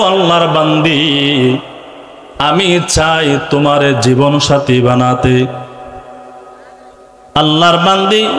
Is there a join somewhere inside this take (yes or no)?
no